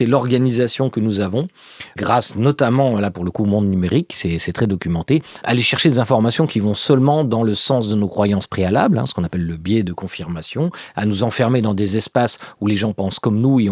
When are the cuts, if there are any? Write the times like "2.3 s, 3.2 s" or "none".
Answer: 1.9 s, 5.3 s